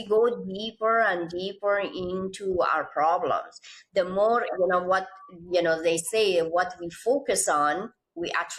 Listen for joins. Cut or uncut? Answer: uncut